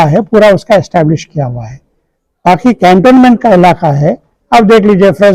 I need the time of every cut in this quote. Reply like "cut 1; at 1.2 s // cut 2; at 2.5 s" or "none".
none